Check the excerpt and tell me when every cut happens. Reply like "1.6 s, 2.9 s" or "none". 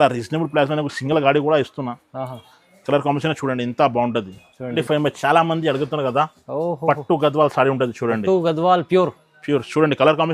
4.6 s